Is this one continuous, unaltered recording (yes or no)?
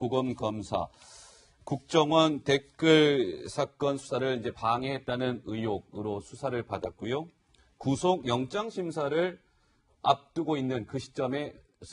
no